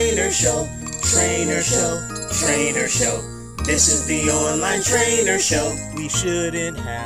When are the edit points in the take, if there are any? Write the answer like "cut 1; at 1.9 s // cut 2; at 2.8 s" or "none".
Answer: none